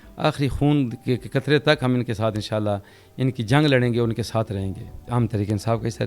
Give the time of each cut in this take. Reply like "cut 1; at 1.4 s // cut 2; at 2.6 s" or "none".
cut 1; at 5.0 s